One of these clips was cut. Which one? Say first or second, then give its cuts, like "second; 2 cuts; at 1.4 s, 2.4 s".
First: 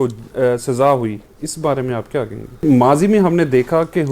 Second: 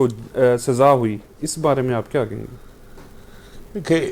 first; 1 cut; at 2.6 s